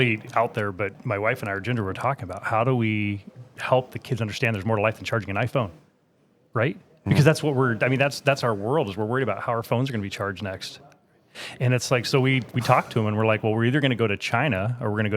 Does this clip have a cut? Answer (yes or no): yes